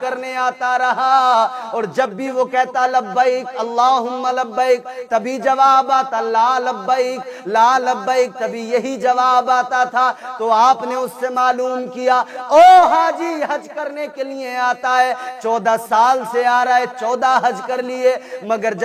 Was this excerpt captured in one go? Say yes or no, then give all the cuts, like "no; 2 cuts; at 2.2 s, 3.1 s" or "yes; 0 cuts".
yes; 0 cuts